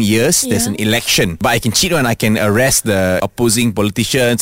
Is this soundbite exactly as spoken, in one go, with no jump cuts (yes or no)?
no